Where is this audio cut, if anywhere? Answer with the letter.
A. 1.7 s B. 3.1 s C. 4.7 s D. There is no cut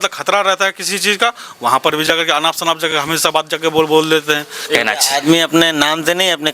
C